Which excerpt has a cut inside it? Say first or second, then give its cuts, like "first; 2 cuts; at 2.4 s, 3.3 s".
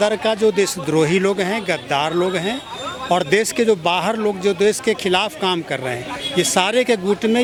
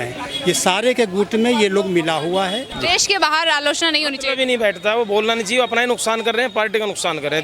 second; 1 cut; at 2.7 s